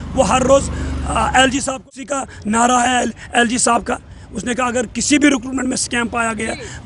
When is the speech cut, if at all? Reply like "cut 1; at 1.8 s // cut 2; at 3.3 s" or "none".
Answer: cut 1; at 1.7 s